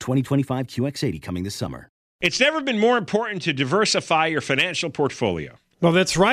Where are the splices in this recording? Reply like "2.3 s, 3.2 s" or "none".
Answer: 2.0 s